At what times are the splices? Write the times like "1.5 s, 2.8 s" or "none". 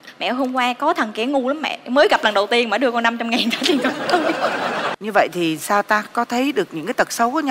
4.9 s